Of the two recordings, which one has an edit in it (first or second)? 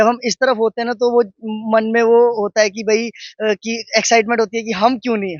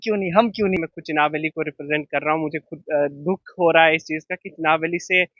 second